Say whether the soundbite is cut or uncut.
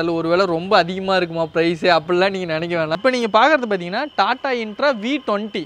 cut